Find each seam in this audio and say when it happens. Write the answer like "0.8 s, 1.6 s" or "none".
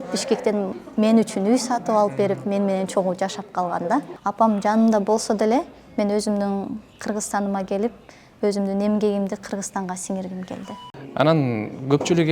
4.1 s, 10.8 s